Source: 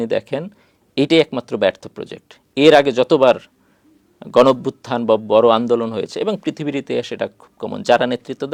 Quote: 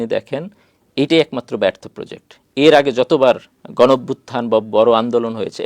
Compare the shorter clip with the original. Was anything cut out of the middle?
yes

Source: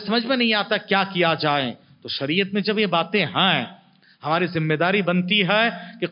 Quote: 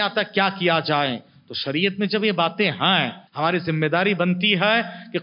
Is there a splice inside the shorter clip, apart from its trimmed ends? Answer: yes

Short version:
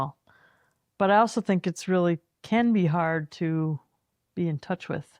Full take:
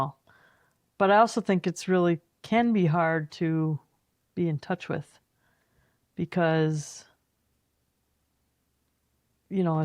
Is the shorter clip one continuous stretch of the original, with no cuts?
yes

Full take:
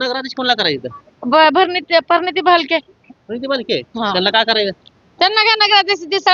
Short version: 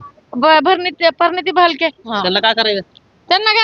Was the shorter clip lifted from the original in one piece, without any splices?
no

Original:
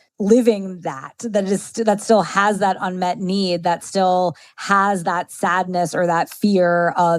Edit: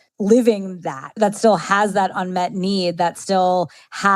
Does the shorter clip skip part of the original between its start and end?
yes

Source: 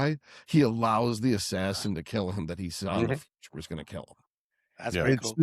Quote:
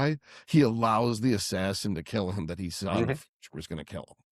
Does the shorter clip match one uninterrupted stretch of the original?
yes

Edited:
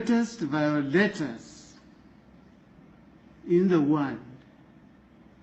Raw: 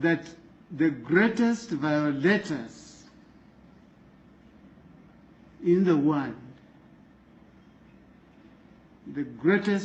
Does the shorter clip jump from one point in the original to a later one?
yes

